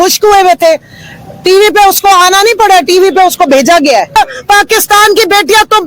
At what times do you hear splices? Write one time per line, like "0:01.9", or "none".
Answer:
0:04.1